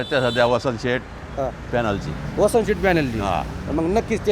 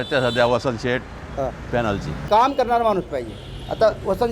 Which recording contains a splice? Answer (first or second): second